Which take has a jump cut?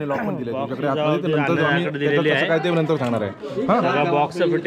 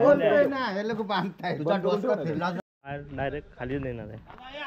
second; 1 cut; at 2.6 s

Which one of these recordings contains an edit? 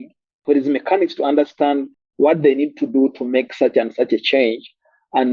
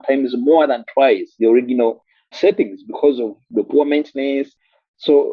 second; 4 cuts; at 1.4 s, 2.3 s, 3.4 s, 4.5 s

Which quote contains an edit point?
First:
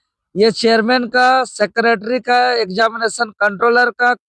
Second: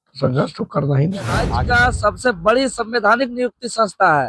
second; 1 cut; at 1.5 s

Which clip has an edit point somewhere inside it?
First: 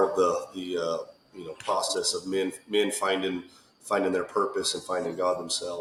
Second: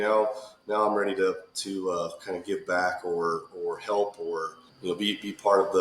second; 1 cut; at 4.6 s

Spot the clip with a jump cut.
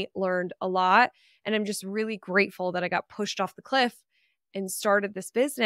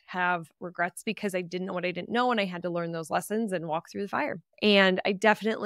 second; 2 cuts; at 1.0 s, 4.4 s

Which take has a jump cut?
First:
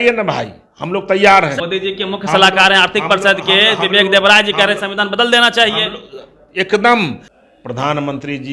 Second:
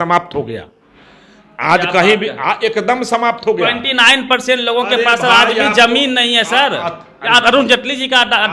first; 2 cuts; at 1.6 s, 7.3 s

